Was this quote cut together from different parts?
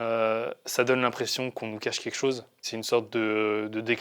yes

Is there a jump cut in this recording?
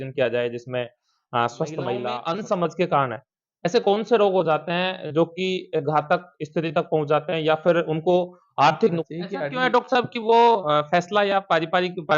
yes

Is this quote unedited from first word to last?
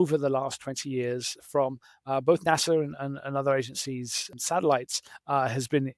no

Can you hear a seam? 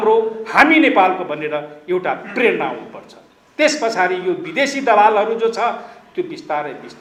no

